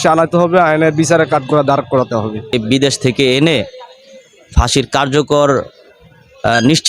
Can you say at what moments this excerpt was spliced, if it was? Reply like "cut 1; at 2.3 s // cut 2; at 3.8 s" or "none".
cut 1; at 2.6 s

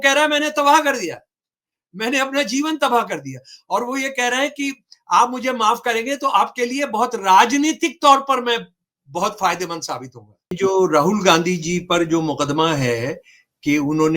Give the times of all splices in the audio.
cut 1; at 10.6 s

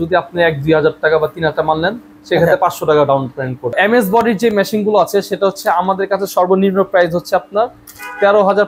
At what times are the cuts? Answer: cut 1; at 3.7 s

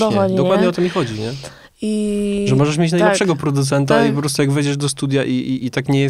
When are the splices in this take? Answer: none

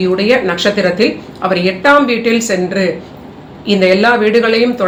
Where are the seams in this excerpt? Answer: none

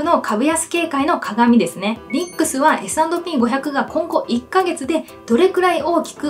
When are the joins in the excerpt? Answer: cut 1; at 2.1 s

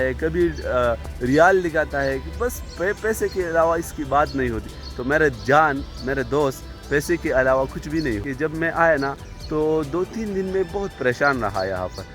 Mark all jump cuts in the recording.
cut 1; at 8.3 s

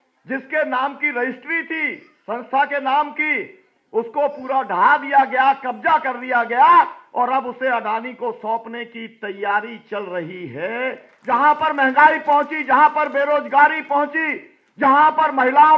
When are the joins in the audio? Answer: cut 1; at 11.1 s

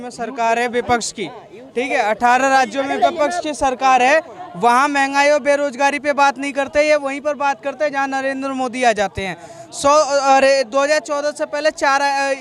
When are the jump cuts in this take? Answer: none

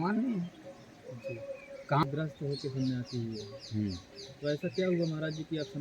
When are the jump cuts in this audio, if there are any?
cut 1; at 2.0 s

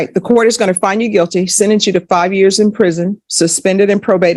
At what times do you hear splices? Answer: none

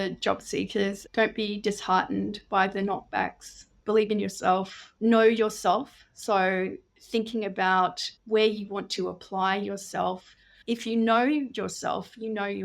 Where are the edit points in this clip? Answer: cut 1; at 1.0 s // cut 2; at 4.8 s

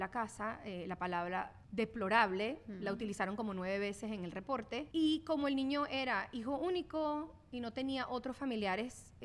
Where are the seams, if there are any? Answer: cut 1; at 1.6 s // cut 2; at 4.8 s

